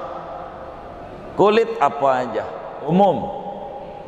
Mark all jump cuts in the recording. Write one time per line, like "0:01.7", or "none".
0:02.9